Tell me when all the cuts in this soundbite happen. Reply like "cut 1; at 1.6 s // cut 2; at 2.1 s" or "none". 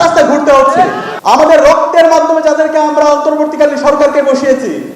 cut 1; at 1.1 s